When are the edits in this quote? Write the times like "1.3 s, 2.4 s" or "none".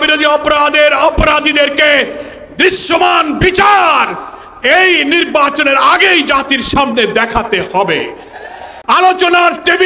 8.7 s